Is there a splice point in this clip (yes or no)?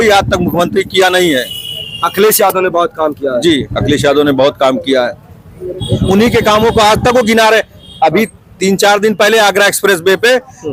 no